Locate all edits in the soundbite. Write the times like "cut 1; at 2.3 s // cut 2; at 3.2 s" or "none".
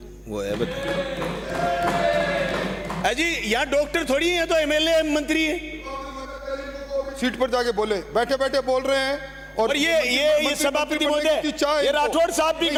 none